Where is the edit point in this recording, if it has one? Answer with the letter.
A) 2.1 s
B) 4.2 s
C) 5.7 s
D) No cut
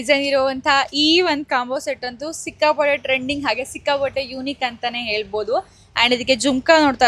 D